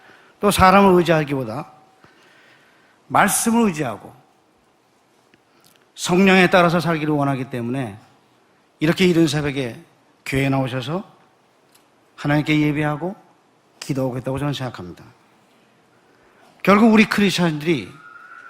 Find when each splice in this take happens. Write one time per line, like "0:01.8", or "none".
0:04.8

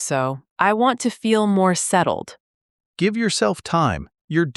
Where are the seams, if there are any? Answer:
0:02.3

